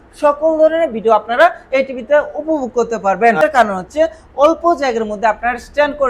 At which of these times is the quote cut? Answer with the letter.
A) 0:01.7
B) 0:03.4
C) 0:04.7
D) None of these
B